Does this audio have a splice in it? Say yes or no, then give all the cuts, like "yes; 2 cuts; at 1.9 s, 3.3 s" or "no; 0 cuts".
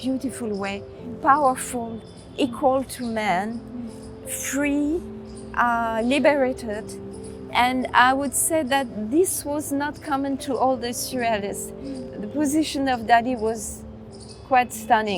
no; 0 cuts